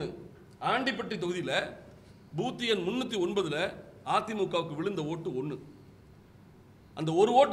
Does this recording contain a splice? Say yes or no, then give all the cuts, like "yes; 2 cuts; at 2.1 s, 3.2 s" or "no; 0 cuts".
no; 0 cuts